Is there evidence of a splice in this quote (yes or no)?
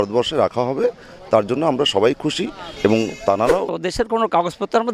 yes